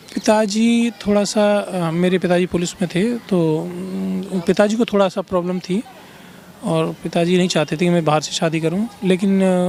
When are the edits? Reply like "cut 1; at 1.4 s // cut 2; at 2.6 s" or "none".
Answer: none